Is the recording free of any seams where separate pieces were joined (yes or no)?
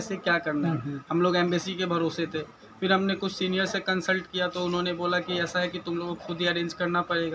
yes